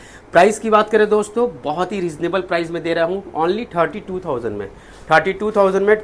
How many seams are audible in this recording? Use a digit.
0